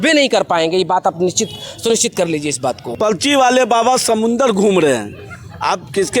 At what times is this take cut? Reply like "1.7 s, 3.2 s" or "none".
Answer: 2.9 s

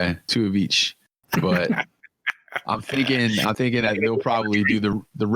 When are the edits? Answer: none

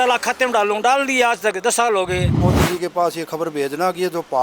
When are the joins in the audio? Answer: 2.4 s

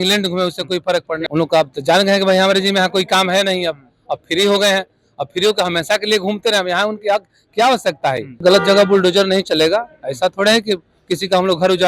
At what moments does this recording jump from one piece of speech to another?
1.2 s, 8.4 s

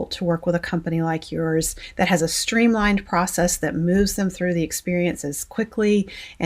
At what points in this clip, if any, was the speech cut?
1.8 s

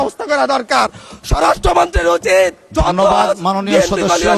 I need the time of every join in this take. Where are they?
none

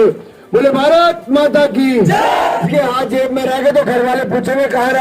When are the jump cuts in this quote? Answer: 2.6 s

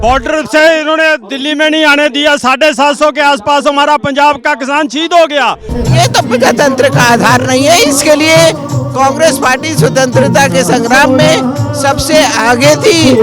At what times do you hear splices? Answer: 5.7 s

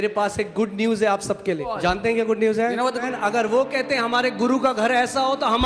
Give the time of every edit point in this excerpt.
1.7 s, 3.1 s

